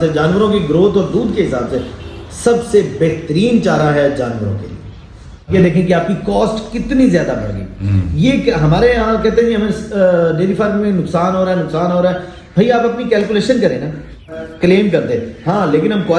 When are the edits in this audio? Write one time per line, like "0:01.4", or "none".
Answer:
0:05.5
0:14.4

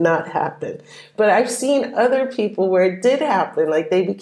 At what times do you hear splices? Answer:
none

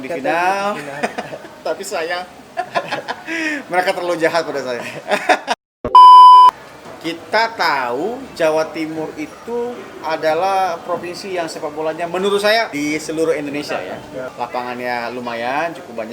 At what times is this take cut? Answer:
0:05.6
0:06.5
0:12.7
0:14.2

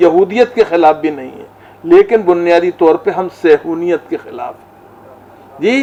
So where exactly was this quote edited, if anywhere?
none

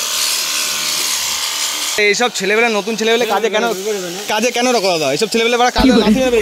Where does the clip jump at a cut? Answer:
0:02.0

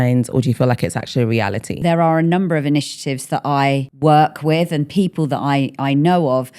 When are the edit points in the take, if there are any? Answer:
0:01.8
0:03.9

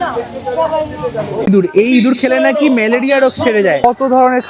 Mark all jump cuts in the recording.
0:01.5
0:03.8

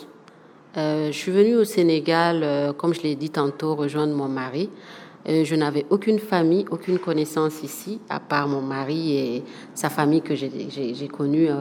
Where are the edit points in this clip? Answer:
none

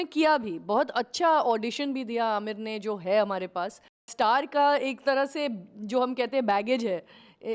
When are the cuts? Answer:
0:04.1

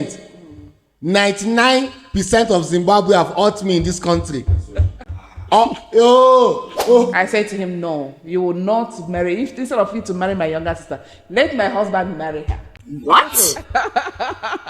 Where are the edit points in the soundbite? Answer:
0:07.1

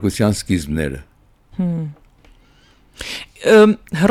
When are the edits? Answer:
none

